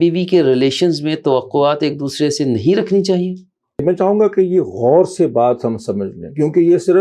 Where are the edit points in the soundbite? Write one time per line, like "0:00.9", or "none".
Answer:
0:03.8

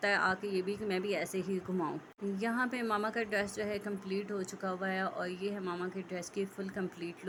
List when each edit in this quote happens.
none

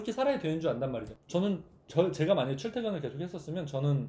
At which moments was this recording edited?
0:01.2

